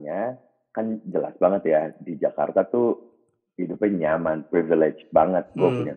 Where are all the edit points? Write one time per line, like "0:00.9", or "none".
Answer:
none

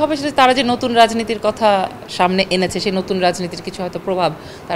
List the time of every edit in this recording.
none

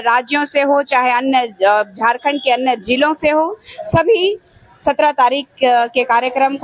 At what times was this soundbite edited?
none

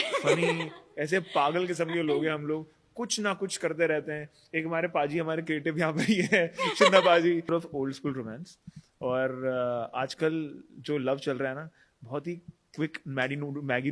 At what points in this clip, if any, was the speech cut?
0:07.5

